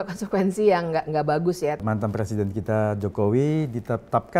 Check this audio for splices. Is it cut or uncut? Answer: cut